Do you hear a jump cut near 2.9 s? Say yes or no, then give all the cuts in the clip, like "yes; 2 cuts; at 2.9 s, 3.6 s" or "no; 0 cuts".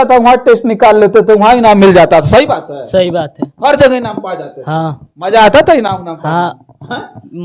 no; 0 cuts